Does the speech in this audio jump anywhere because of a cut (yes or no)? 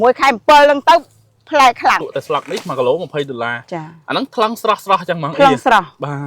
yes